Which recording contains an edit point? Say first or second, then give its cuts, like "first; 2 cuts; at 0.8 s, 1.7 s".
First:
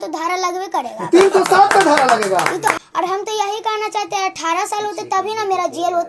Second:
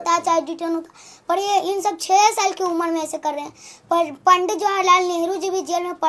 first; 1 cut; at 2.8 s